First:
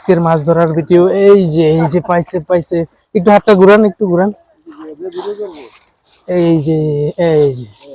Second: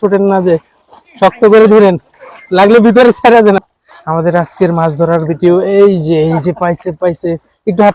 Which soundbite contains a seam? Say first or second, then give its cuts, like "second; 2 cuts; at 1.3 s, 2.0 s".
second; 1 cut; at 3.6 s